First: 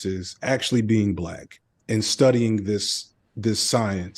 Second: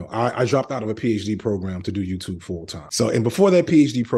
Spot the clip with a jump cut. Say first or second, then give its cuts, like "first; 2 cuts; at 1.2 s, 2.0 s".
second; 1 cut; at 3.2 s